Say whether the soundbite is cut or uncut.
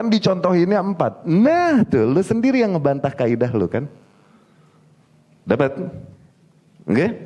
uncut